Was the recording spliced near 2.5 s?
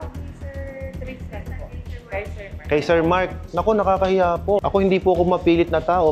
no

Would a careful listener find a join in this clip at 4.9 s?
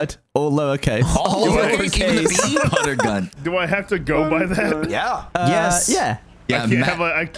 yes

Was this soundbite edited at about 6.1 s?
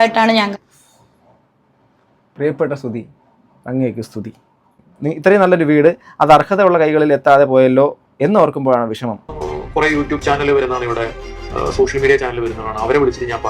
no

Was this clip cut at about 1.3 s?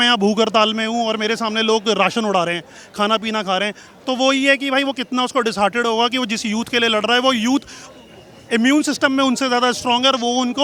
no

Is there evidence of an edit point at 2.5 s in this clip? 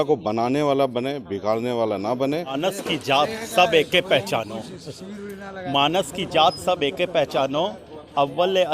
yes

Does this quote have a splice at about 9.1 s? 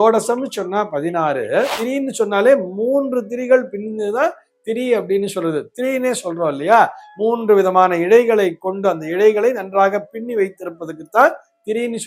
no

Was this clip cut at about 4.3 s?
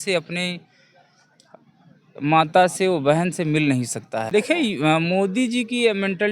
yes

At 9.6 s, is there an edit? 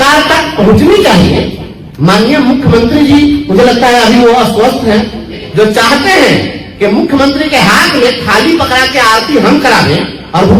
no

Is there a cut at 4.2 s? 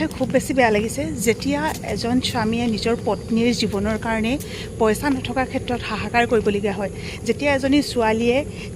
no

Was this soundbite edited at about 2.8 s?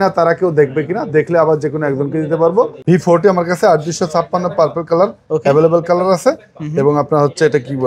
yes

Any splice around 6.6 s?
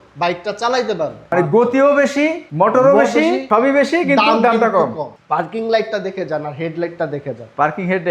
no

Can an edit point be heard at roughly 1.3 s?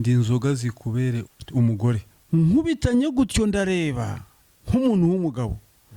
yes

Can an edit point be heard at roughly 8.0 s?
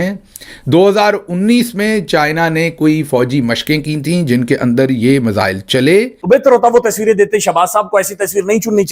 no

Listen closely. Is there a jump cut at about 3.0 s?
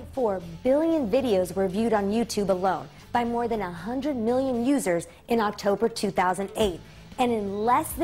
no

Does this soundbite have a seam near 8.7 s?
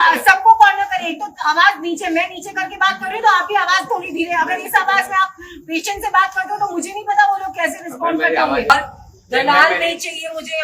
yes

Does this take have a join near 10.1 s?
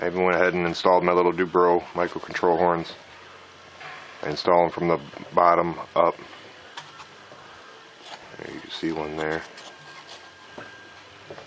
yes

